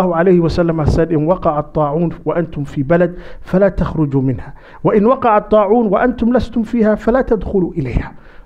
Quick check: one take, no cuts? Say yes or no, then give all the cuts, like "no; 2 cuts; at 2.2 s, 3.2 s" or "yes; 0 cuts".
yes; 0 cuts